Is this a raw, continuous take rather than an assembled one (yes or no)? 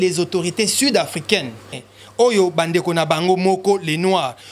no